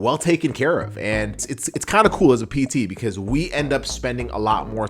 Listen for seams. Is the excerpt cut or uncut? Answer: cut